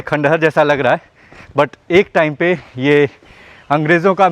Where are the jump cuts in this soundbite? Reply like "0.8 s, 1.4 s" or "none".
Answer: none